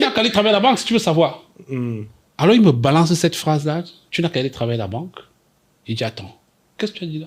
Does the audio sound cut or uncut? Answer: uncut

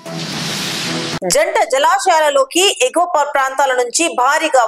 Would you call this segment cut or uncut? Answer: uncut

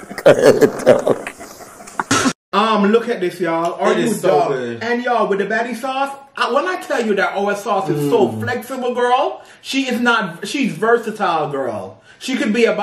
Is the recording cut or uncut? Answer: cut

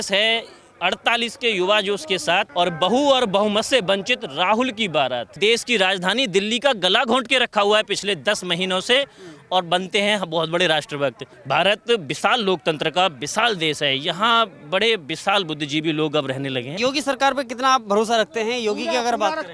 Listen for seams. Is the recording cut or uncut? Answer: cut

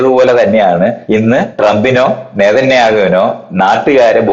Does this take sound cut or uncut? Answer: cut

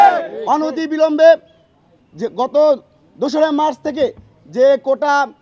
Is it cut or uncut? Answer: uncut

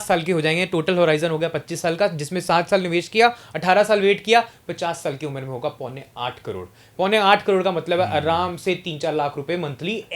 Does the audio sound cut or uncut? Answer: uncut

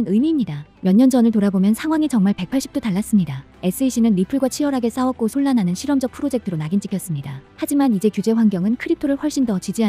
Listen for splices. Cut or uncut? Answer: uncut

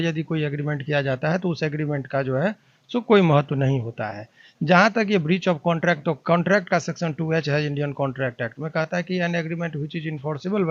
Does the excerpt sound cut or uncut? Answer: uncut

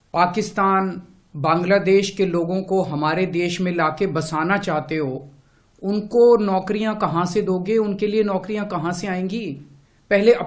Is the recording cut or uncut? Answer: uncut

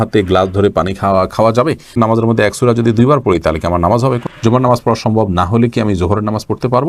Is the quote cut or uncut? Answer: cut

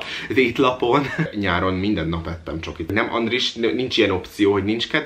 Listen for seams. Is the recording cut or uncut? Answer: cut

